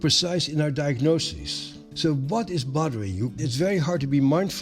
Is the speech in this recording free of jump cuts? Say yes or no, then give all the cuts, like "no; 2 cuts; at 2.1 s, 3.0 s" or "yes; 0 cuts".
no; 2 cuts; at 1.8 s, 3.4 s